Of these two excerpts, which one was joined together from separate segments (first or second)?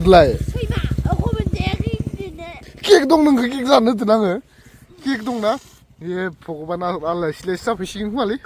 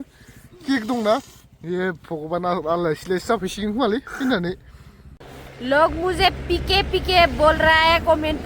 second